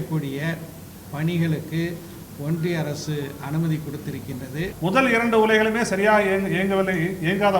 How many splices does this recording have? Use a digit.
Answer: 1